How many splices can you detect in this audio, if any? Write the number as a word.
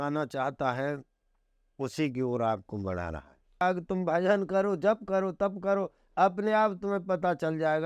one